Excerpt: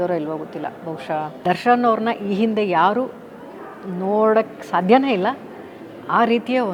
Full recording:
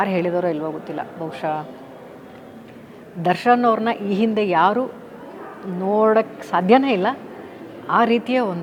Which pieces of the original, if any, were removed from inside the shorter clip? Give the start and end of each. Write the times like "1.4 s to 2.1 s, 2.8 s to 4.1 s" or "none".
1.7 s to 3.2 s